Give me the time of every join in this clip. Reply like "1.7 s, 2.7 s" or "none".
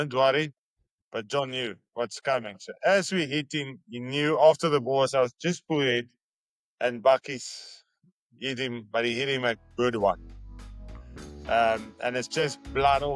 none